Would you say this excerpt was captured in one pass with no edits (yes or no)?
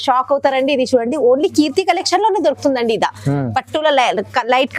yes